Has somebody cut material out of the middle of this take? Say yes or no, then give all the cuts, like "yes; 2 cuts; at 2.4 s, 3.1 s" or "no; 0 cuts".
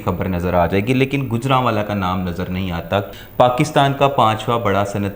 yes; 1 cut; at 3.1 s